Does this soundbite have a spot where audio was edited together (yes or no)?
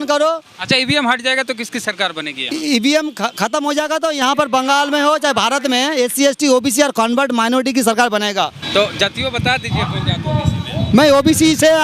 yes